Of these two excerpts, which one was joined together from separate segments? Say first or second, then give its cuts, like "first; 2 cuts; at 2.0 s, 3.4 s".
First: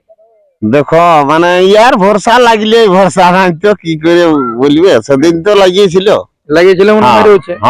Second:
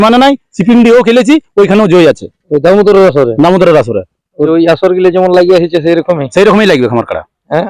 second; 1 cut; at 4.5 s